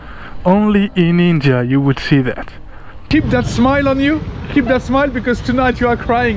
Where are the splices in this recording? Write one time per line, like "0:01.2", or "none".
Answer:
0:02.9